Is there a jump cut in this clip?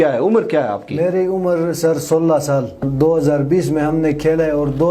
yes; 1 cut; at 2.8 s

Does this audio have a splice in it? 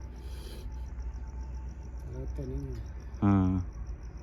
no; 0 cuts

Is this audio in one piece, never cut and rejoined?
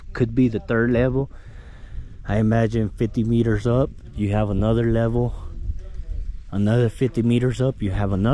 yes; 0 cuts

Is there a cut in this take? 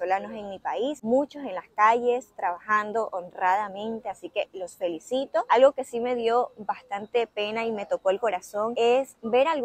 no; 0 cuts

